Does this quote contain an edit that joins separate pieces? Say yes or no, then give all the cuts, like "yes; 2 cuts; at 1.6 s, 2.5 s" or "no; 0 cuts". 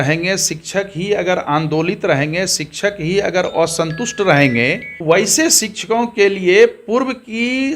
yes; 1 cut; at 4.9 s